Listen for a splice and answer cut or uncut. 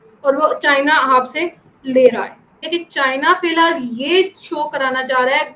cut